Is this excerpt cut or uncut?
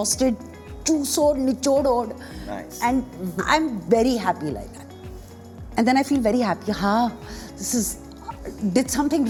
uncut